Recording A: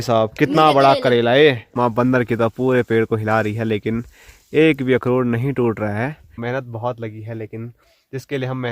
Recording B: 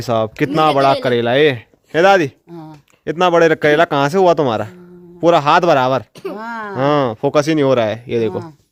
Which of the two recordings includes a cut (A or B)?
A